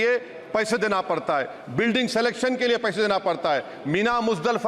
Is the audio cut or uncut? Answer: uncut